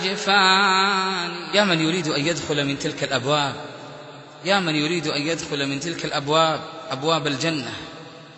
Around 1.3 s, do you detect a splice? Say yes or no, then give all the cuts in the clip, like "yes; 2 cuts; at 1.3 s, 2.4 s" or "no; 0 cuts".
yes; 1 cut; at 1.3 s